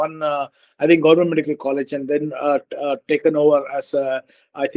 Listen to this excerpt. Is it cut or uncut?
uncut